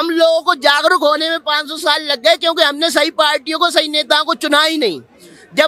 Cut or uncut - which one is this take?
uncut